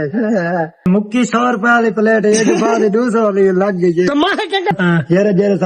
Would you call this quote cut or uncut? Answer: cut